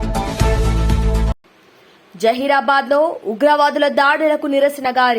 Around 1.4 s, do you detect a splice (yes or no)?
yes